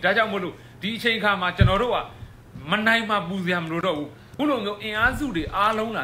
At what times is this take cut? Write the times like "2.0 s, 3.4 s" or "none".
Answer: 4.2 s